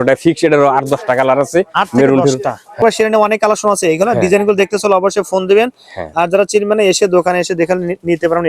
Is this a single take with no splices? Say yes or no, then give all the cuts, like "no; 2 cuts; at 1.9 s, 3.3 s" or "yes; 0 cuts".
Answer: no; 1 cut; at 2.8 s